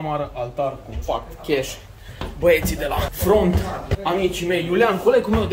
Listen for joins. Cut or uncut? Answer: cut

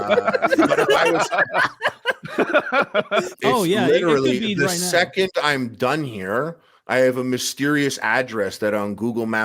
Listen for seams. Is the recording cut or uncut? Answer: cut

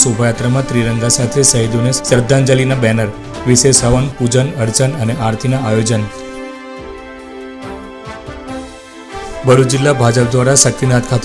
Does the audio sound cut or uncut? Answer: uncut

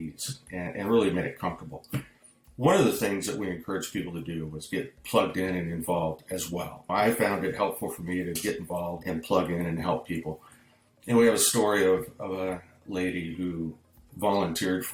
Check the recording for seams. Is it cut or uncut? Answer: uncut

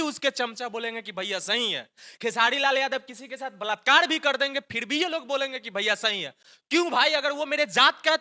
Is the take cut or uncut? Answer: uncut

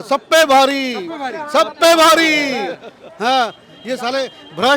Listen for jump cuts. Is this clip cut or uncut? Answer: uncut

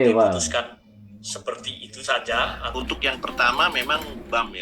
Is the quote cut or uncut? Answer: cut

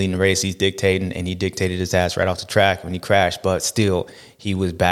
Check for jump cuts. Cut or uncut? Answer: cut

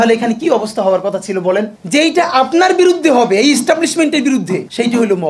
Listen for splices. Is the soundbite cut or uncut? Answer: cut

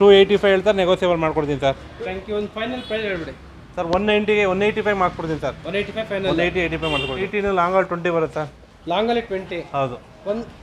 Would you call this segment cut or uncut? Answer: cut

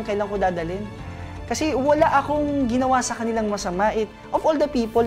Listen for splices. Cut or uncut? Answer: cut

